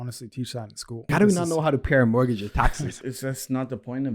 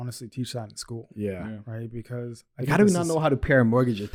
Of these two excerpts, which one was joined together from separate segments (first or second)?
first